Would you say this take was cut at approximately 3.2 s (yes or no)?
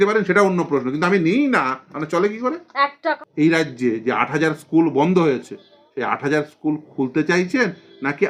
yes